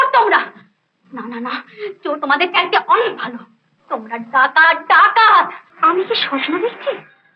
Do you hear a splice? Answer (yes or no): yes